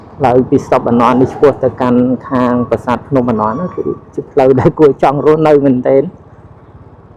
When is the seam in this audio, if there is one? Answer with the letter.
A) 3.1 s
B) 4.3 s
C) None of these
C